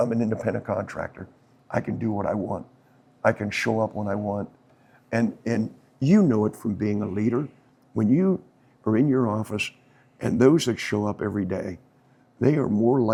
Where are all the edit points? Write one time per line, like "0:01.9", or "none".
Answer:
none